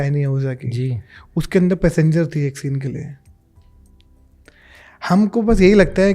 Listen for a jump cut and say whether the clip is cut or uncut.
uncut